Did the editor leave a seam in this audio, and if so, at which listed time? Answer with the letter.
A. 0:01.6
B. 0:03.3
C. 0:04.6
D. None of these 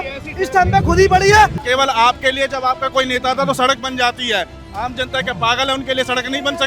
A